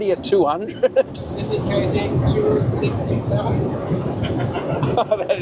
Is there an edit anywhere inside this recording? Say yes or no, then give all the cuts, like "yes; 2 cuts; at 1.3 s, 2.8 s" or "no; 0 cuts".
no; 0 cuts